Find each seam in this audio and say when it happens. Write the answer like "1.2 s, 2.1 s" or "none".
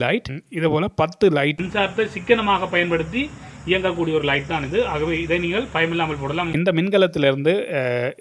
1.6 s, 6.5 s